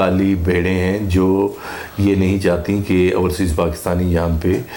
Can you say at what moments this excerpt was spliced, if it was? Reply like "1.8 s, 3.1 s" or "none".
none